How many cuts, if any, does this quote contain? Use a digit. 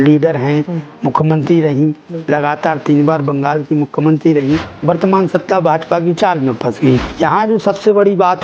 2